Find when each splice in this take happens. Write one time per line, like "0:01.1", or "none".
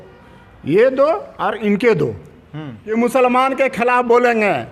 0:02.4